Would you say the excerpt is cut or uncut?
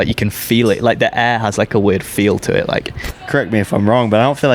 cut